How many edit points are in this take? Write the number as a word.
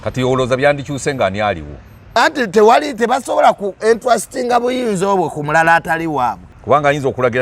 one